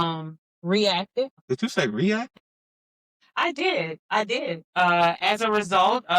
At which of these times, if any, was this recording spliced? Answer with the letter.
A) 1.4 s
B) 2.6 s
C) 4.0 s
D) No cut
A